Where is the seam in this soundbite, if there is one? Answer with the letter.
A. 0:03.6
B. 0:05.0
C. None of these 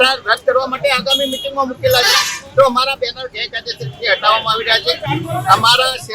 C